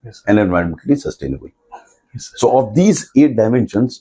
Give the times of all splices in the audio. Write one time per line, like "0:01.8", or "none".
none